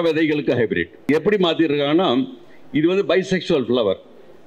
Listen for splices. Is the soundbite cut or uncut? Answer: cut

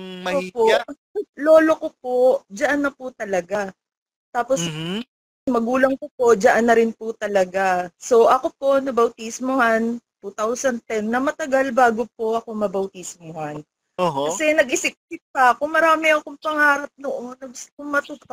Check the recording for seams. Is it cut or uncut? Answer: cut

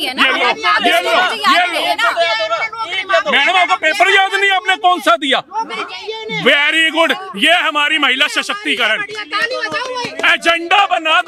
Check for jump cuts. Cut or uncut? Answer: uncut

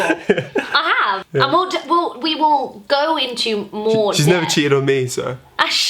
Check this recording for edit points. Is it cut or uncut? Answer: cut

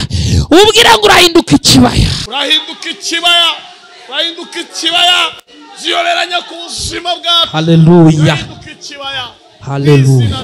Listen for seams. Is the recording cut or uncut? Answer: uncut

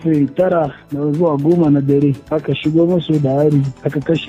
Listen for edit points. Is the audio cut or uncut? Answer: uncut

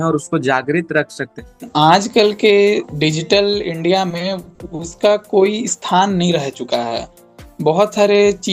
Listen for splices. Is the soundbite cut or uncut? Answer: cut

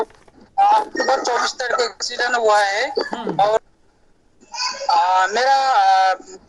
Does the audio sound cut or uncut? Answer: cut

